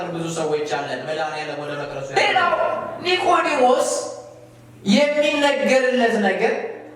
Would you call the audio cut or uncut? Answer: cut